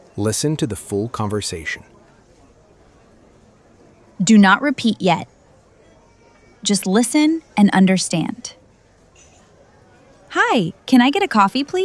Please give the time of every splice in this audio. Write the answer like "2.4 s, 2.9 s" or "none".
8.6 s, 10.0 s